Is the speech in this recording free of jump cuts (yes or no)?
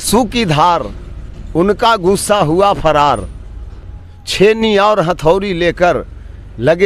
yes